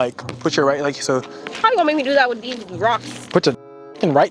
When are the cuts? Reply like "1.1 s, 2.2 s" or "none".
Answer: 1.5 s